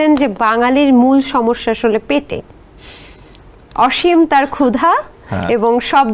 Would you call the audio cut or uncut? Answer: uncut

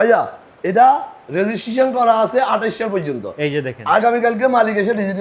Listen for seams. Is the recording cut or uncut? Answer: uncut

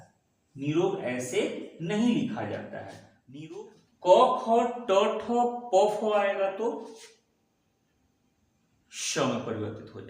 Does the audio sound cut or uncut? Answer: cut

